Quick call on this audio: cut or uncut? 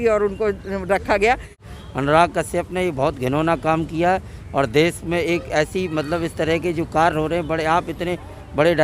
cut